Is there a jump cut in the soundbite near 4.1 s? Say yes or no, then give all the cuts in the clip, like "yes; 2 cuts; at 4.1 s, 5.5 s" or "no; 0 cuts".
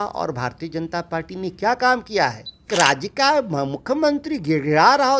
no; 1 cut; at 2.7 s